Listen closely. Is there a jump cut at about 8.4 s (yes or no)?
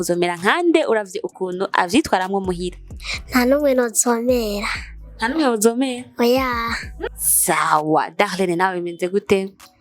no